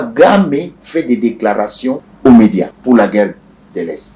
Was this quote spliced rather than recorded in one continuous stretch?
yes; 2 cuts; at 2.1 s, 2.7 s

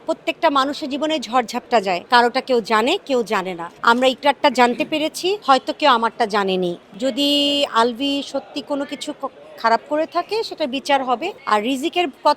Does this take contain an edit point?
yes; 5 cuts; at 2.0 s, 3.6 s, 5.4 s, 6.8 s, 11.3 s

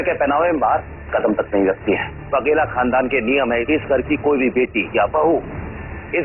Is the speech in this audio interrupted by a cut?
yes; 2 cuts; at 2.2 s, 3.6 s

